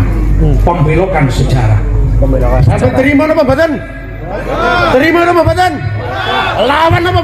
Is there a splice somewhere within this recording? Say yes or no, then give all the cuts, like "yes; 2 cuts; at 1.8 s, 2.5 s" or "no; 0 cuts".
no; 0 cuts